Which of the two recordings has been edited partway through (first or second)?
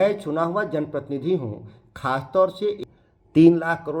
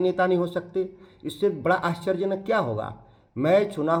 first